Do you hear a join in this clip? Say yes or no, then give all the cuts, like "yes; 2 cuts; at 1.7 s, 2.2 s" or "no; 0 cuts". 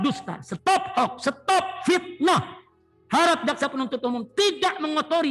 no; 0 cuts